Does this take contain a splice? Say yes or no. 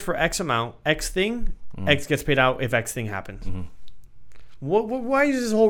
no